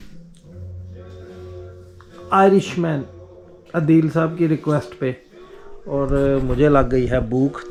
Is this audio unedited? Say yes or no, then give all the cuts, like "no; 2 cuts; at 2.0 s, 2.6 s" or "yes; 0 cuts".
yes; 0 cuts